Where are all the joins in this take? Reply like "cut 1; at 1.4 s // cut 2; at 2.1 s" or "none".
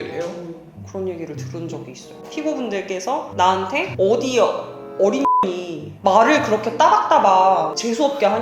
cut 1; at 2.1 s